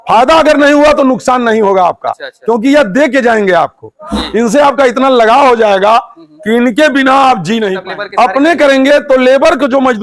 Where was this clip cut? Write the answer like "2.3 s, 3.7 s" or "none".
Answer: 7.8 s

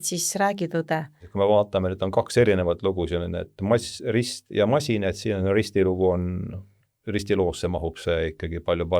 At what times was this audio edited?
1.2 s

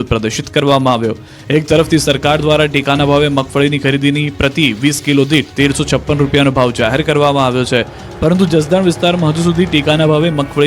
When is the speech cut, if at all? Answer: 5.8 s

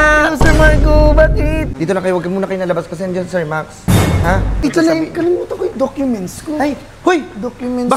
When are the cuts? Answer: 1.7 s, 4.6 s

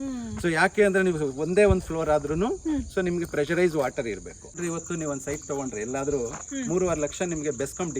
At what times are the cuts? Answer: 4.6 s

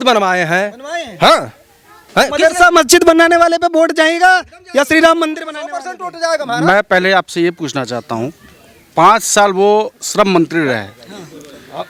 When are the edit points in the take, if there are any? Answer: none

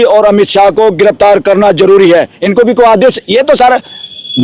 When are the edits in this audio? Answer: 2.4 s

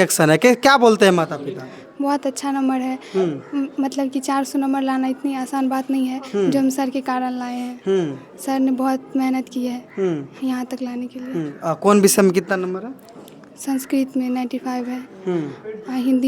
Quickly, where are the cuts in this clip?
none

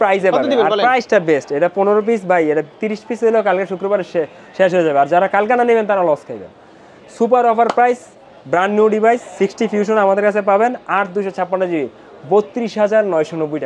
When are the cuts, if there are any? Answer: none

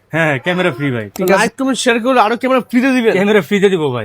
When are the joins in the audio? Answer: 1.4 s

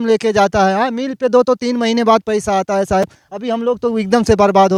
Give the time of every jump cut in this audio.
none

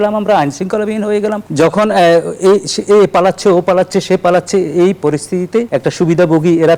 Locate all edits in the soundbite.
1.4 s, 5.7 s

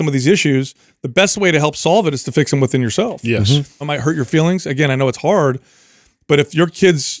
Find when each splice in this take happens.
3.9 s

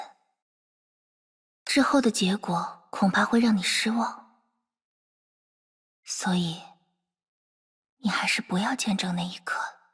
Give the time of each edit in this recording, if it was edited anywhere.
none

